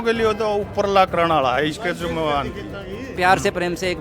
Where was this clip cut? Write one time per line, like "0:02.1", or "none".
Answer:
0:03.1

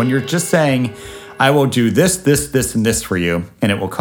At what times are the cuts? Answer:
none

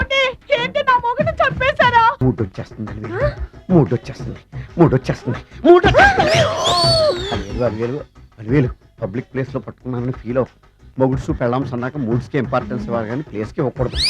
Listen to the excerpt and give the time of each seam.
0:02.2

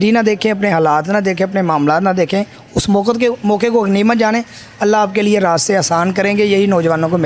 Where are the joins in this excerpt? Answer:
none

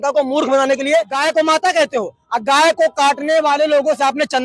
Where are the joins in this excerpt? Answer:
0:01.1

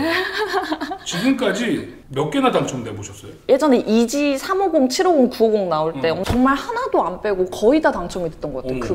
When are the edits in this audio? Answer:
0:03.3
0:06.2

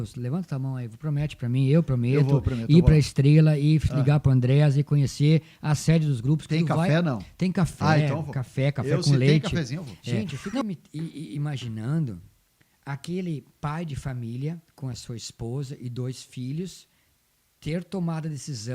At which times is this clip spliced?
0:10.6

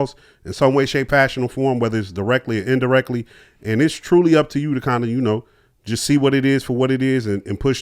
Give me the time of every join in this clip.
none

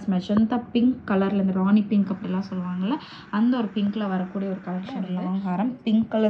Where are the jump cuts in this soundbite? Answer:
0:05.2

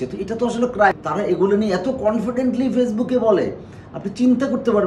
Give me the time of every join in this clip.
0:00.9

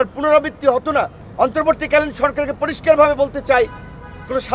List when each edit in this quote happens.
0:01.2

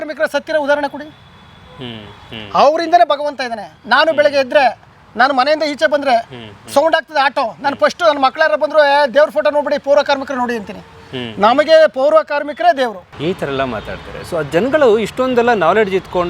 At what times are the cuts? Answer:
0:13.1

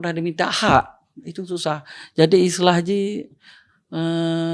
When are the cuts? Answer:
none

